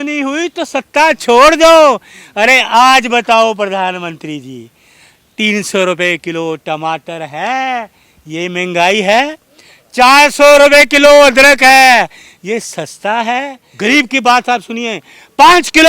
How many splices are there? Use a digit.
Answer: 1